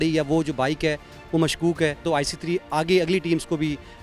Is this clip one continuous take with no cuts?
no; 1 cut; at 2.0 s

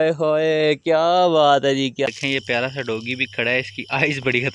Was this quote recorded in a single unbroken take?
no; 1 cut; at 2.1 s

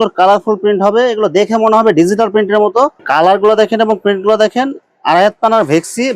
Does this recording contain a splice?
yes; 1 cut; at 3.0 s

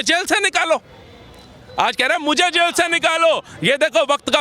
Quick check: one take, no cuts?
yes; 0 cuts

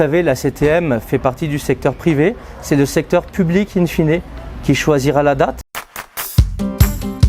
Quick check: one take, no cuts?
no; 1 cut; at 5.6 s

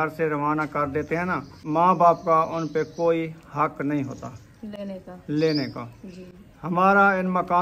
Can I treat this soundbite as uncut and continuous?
no; 1 cut; at 1.5 s

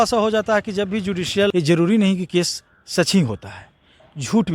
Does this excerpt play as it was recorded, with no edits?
no; 1 cut; at 1.5 s

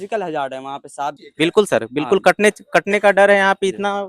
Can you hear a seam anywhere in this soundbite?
yes; 1 cut; at 1.2 s

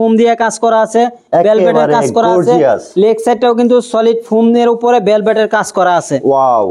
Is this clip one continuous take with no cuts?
yes; 0 cuts

